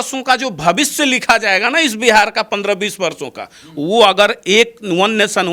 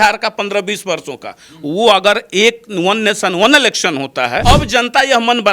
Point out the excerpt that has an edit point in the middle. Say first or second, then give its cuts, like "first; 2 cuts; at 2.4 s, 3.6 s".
second; 1 cut; at 4.4 s